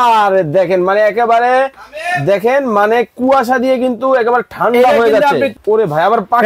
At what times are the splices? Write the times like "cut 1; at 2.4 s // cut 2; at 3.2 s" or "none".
cut 1; at 5.5 s

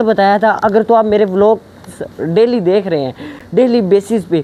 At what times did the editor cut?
none

